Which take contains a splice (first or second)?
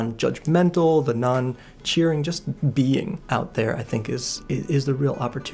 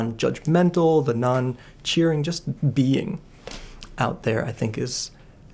first